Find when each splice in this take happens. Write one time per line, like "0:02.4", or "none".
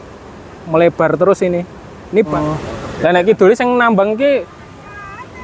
0:02.3